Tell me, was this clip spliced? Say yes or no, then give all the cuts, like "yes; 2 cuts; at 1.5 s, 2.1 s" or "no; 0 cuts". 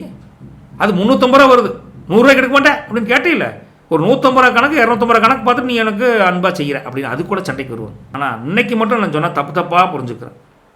yes; 1 cut; at 8.0 s